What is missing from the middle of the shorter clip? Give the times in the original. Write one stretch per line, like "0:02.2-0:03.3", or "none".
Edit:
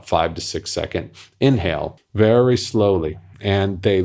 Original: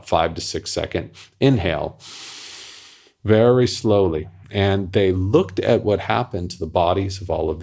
0:02.0-0:03.1